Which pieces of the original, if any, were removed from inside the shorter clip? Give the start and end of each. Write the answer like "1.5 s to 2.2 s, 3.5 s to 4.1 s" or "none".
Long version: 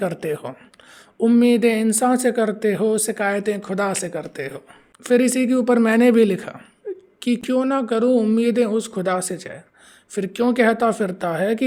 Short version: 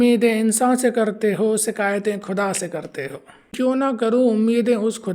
4.9 s to 7.4 s